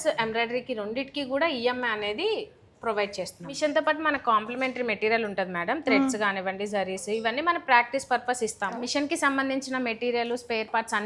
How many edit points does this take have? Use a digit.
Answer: 2